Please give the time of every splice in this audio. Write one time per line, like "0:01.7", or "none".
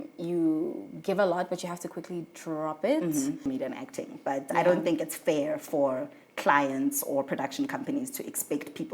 0:03.4